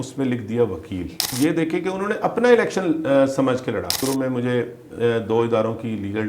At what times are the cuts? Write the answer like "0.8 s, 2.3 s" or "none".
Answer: 1.3 s, 4.0 s

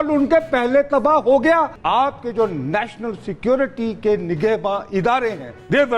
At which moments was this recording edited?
1.8 s

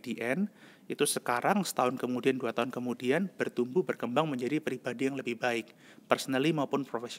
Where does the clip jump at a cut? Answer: none

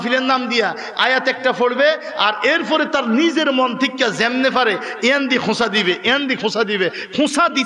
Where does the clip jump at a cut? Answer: none

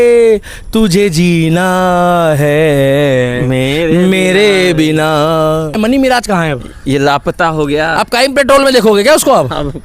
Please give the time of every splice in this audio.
5.8 s

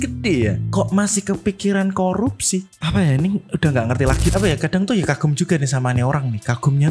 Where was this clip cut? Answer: 4.2 s

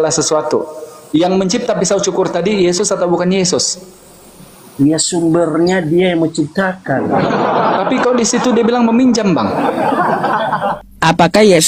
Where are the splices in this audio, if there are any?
10.8 s

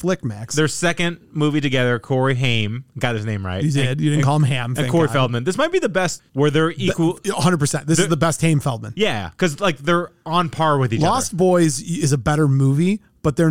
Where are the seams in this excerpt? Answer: none

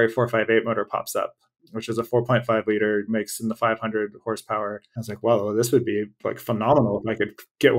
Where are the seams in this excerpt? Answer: 3.1 s, 4.9 s

